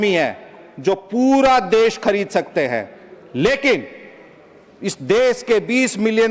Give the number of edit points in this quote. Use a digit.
0